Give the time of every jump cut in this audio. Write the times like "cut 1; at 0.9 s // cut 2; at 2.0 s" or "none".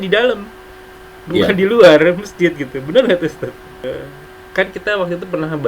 cut 1; at 3.9 s